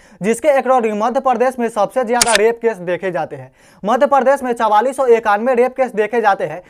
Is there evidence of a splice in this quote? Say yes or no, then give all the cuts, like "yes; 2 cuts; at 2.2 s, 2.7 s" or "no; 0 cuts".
no; 0 cuts